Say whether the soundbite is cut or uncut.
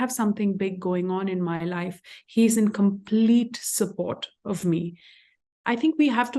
cut